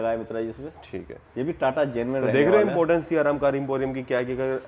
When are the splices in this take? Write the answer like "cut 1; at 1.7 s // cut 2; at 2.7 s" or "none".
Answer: none